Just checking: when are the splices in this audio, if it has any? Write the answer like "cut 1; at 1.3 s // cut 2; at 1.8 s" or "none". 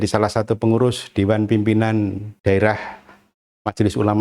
cut 1; at 2.3 s